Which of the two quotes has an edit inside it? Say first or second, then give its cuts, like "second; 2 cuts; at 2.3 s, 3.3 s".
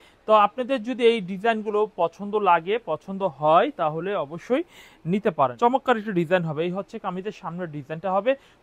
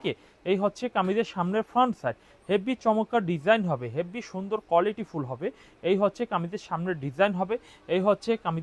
first; 1 cut; at 5.5 s